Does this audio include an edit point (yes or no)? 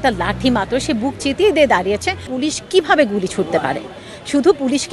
yes